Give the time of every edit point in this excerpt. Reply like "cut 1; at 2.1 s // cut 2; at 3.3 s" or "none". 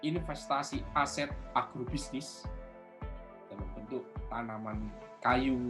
cut 1; at 2.2 s // cut 2; at 3.6 s

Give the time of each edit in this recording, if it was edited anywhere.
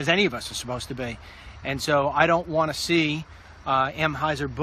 cut 1; at 3.6 s

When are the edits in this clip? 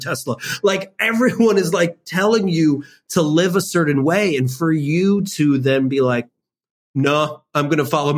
cut 1; at 6.3 s

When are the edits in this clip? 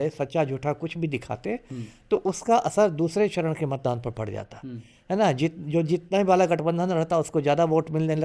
none

